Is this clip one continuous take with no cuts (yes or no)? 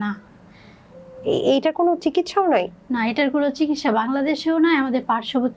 yes